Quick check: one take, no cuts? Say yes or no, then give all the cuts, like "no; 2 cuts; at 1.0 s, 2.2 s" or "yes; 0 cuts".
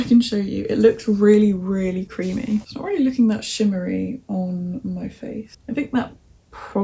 no; 2 cuts; at 2.7 s, 5.5 s